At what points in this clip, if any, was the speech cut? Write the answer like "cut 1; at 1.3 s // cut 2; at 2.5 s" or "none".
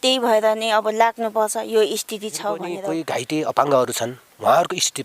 cut 1; at 2.8 s